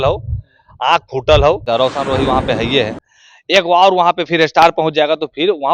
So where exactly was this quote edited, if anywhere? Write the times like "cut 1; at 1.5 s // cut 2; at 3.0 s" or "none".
cut 1; at 1.6 s